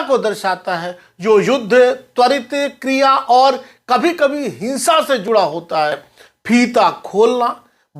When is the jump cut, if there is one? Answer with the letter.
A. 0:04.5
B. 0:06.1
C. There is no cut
B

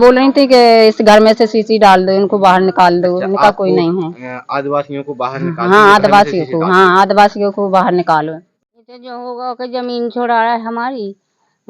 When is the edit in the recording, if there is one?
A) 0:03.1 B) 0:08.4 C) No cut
B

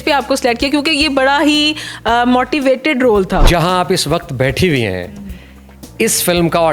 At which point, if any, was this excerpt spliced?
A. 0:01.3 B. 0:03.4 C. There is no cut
B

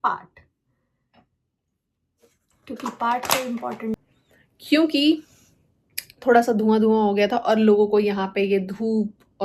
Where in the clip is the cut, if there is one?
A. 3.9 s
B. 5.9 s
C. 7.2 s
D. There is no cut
A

